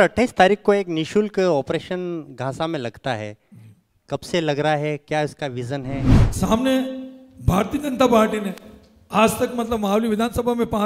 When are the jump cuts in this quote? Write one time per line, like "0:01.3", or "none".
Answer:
0:06.2